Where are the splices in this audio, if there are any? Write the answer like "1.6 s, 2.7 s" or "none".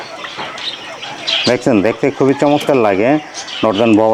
none